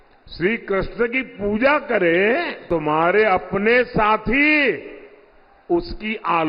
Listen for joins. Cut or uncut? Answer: cut